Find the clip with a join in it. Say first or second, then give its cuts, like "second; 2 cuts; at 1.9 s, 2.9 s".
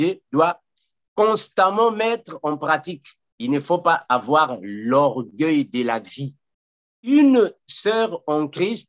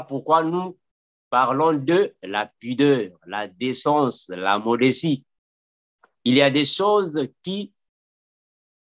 first; 1 cut; at 7.1 s